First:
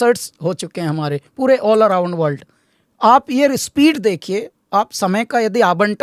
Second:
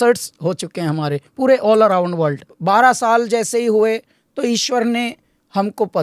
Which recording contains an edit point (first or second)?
second